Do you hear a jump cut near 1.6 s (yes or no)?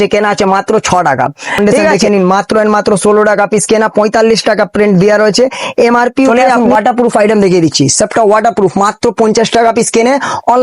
yes